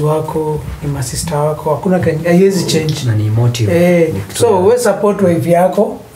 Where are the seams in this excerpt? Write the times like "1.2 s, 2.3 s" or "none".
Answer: none